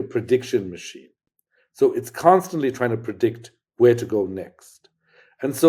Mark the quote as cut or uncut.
uncut